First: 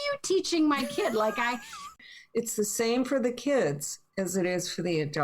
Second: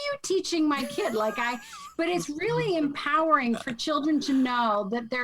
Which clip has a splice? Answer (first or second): first